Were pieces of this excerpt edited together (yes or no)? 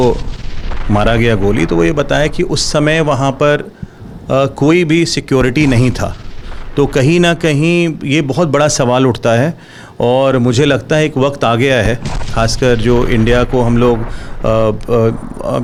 no